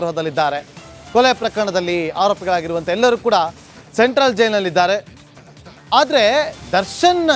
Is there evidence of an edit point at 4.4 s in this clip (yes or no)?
no